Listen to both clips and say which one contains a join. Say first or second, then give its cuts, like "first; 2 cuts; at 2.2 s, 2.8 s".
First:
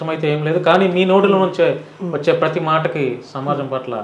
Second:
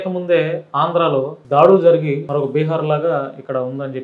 second; 2 cuts; at 1.4 s, 2.2 s